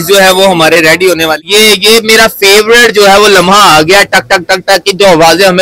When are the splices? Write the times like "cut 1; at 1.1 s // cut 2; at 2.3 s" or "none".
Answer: cut 1; at 1.4 s